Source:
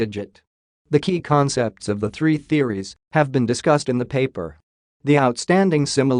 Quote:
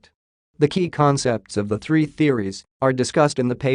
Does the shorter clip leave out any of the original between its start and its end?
yes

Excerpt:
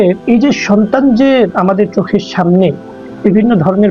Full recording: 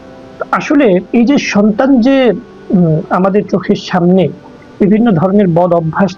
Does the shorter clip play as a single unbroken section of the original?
no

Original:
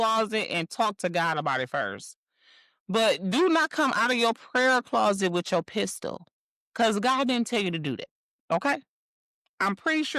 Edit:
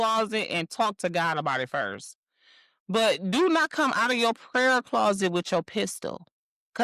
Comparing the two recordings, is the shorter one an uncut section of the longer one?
yes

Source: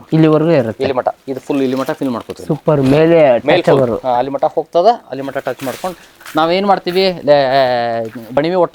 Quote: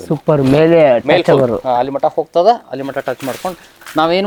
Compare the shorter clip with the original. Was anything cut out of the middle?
no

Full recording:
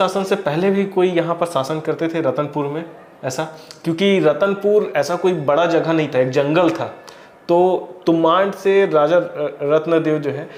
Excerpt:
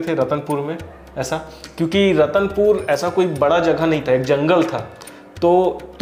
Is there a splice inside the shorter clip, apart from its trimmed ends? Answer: no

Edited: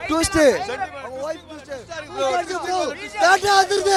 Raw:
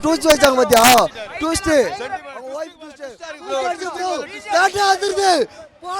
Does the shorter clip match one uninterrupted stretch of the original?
yes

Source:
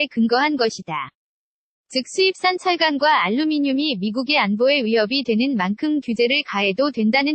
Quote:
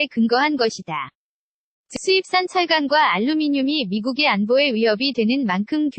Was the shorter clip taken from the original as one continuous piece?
no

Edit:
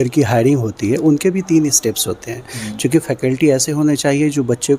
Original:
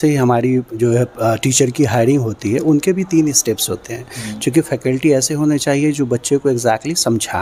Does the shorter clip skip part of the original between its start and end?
no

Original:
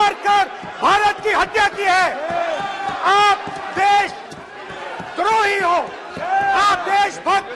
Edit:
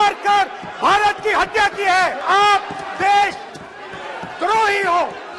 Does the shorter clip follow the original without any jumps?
no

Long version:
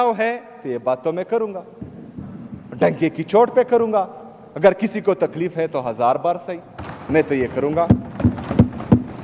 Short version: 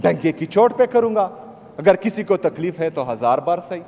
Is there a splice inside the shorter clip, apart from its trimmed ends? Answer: no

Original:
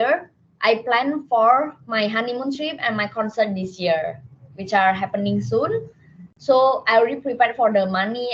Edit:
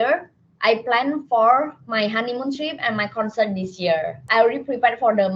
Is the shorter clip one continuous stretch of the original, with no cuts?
no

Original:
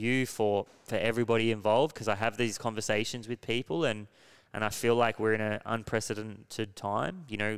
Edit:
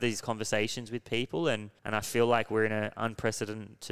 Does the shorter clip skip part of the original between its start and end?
yes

